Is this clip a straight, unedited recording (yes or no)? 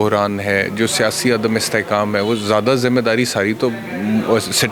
yes